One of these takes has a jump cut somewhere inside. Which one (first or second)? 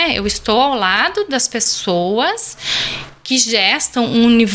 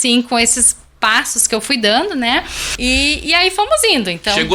second